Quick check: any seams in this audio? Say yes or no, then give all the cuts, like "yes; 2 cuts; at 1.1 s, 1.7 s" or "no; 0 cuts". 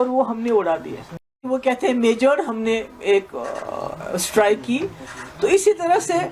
yes; 1 cut; at 1.4 s